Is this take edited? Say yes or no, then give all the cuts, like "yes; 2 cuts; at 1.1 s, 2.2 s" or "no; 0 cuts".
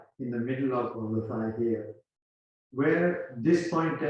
yes; 1 cut; at 0.9 s